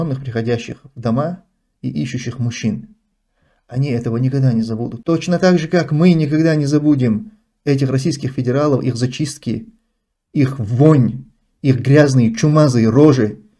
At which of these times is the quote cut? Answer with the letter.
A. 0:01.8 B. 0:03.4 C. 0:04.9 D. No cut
C